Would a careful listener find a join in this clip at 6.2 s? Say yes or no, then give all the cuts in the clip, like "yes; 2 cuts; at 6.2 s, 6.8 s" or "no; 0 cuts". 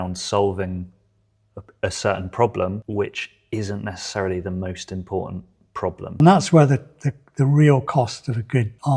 yes; 2 cuts; at 2.8 s, 6.2 s